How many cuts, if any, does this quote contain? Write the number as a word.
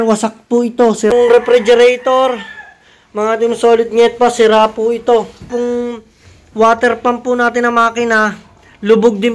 two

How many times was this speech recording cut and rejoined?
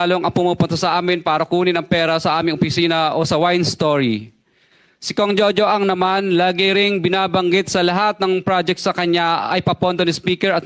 zero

